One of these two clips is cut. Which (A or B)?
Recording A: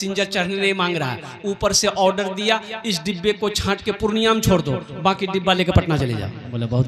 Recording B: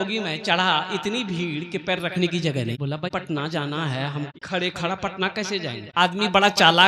B